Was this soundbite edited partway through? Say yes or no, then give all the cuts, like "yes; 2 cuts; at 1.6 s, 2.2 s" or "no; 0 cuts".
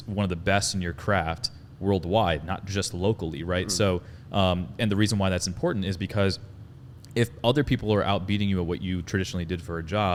no; 0 cuts